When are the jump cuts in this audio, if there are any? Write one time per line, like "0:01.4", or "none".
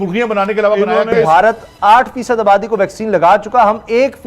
0:01.3